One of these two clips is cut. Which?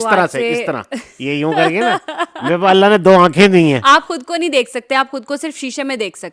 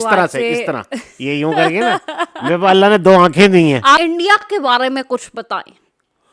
second; 1 cut; at 4.4 s

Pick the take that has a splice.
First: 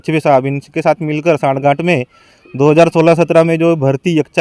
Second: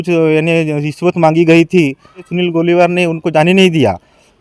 second; 1 cut; at 2.3 s

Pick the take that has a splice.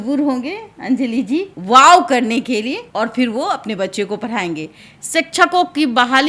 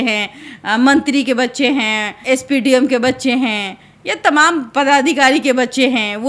first; 3 cuts; at 1.5 s, 2.8 s, 4.9 s

